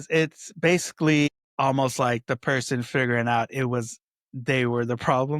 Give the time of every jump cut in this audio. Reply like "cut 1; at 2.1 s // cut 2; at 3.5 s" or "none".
cut 1; at 1.4 s